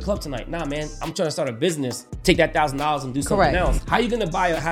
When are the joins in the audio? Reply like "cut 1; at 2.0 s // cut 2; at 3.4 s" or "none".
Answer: cut 1; at 2.1 s // cut 2; at 3.8 s